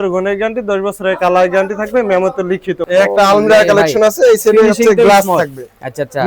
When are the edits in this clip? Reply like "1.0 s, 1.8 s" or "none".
2.8 s